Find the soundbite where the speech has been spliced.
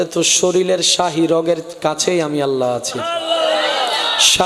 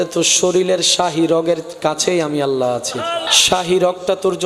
second; 1 cut; at 3.2 s

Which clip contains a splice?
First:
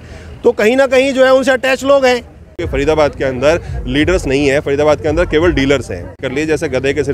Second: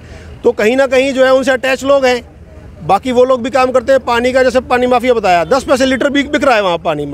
first; 2 cuts; at 2.6 s, 6.2 s

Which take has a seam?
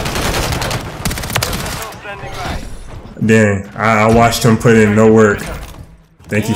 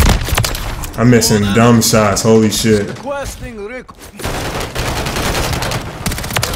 second; 1 cut; at 3.8 s

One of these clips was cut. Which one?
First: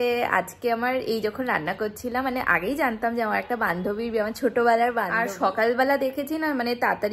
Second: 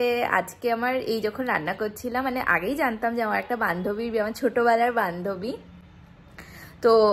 first; 1 cut; at 5.2 s

